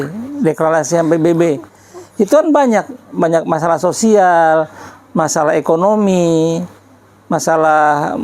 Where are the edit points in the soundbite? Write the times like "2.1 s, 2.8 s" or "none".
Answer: none